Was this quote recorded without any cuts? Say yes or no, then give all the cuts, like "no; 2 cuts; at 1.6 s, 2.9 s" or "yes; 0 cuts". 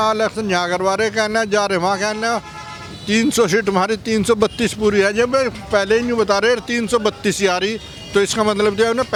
yes; 0 cuts